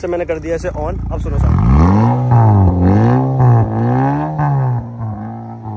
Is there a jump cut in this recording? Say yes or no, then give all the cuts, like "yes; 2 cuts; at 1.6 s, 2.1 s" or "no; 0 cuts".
no; 0 cuts